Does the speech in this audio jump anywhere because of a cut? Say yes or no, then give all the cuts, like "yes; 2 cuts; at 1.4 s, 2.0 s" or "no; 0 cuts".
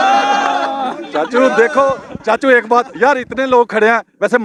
no; 0 cuts